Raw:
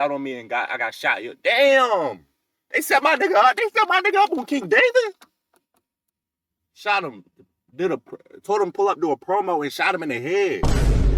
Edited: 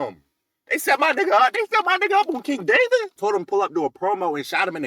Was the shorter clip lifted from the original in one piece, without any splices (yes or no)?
no